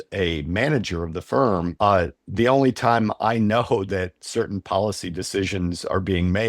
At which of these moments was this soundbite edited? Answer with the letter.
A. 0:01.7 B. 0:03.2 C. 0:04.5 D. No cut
A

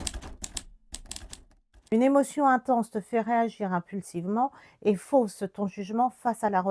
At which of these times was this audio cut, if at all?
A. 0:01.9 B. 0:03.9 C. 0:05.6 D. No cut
A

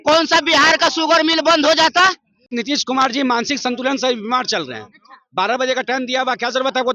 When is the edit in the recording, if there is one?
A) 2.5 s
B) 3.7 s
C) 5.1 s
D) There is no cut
A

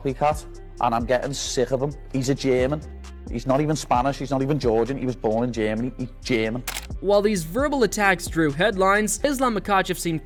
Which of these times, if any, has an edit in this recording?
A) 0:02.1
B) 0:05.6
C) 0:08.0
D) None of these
D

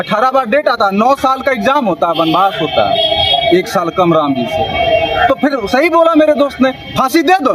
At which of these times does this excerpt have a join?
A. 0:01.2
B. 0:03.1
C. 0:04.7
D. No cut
D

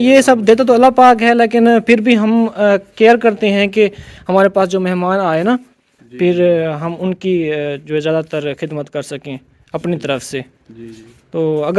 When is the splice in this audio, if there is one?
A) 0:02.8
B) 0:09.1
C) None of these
C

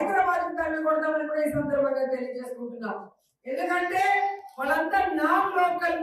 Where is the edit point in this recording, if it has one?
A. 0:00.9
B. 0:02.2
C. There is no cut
B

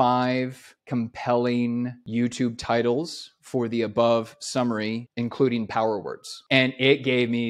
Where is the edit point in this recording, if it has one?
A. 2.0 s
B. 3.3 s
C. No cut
A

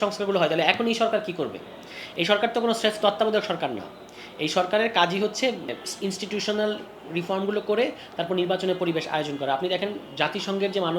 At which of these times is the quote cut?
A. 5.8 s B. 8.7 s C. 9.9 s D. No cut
A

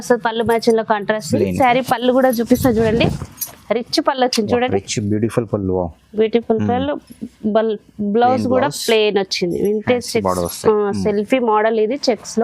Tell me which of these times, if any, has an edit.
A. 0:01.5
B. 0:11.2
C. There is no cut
A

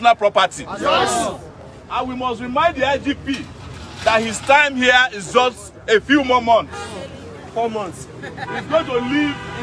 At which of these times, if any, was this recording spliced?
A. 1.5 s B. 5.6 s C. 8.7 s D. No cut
D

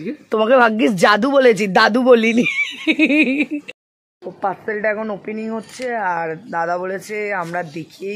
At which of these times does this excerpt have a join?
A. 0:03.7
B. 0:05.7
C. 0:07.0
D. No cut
A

